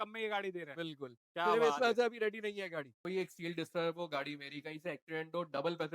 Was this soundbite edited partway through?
yes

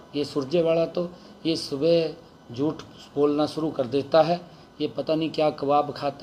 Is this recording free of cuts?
yes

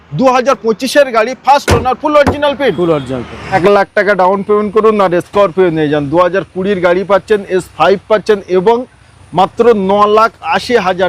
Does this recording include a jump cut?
yes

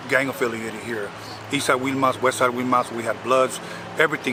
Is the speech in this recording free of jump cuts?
yes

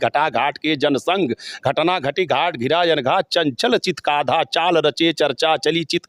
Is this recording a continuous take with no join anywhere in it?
yes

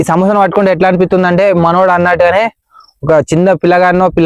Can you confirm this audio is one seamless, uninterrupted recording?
yes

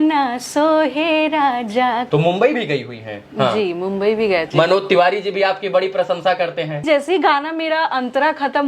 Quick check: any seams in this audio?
yes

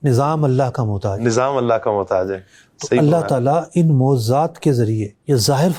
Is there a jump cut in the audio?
no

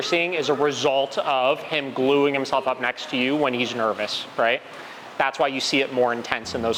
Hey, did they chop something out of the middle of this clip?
no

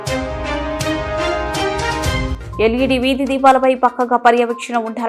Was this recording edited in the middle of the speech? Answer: yes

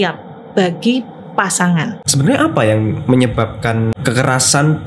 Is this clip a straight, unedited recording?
no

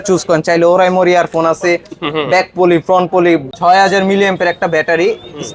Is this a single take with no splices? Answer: no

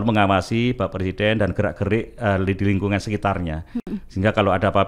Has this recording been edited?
no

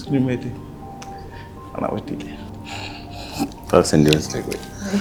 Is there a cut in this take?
no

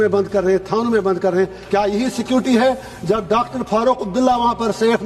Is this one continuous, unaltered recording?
no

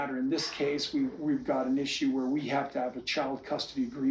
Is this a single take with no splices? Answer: yes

